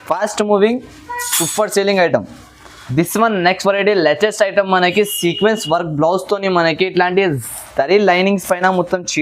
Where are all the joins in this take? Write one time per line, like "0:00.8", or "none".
0:02.7